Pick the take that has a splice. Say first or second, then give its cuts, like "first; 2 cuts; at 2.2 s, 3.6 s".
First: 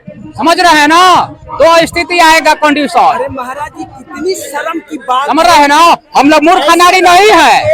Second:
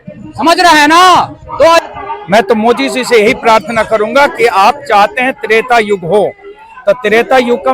second; 1 cut; at 1.8 s